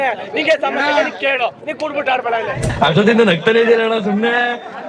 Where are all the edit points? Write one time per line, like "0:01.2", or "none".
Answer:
0:02.7